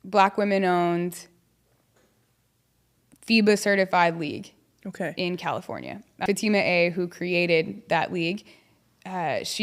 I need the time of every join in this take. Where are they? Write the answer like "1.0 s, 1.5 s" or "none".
6.3 s